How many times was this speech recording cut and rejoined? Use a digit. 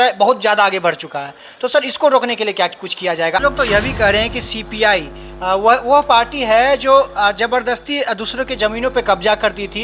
1